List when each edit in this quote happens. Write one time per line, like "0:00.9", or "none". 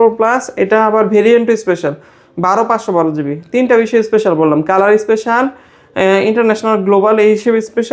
none